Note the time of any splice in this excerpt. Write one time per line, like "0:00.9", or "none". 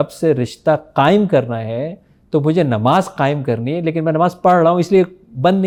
none